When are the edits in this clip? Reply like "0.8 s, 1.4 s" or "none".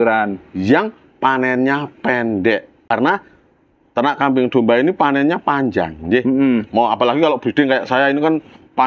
2.8 s